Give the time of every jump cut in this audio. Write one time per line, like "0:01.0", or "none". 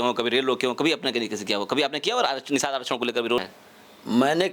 0:03.4